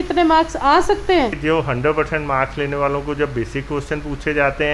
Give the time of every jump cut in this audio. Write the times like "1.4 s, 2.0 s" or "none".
1.4 s